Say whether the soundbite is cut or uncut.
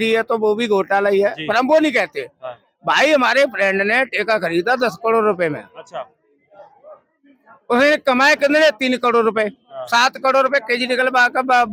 uncut